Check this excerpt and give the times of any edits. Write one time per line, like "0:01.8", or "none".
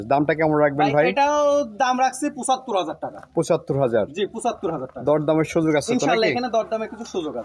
none